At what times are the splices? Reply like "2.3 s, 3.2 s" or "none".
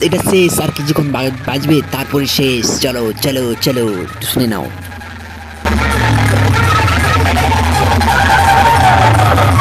none